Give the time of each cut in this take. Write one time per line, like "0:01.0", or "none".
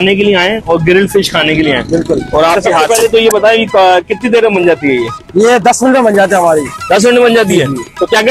0:02.8